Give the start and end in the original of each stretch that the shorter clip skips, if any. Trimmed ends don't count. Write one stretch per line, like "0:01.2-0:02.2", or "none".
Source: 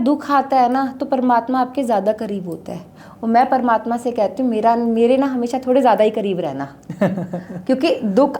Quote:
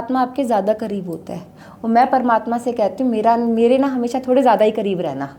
none